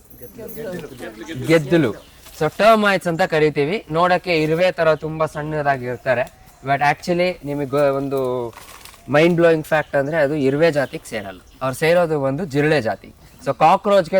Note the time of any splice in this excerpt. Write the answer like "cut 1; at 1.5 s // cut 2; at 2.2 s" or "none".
none